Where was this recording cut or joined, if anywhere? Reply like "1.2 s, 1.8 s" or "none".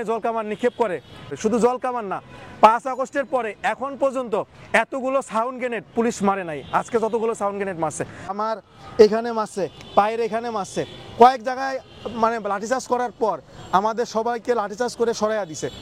1.3 s, 8.3 s